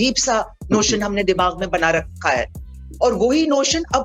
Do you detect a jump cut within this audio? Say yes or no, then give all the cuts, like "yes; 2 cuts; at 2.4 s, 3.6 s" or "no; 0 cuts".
no; 0 cuts